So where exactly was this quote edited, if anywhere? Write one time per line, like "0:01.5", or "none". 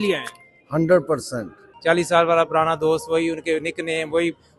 0:01.7